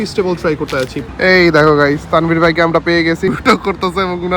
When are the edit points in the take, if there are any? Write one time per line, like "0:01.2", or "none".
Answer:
0:01.1
0:03.3